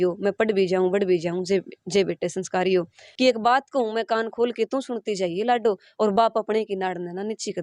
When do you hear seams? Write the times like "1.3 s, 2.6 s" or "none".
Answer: 3.0 s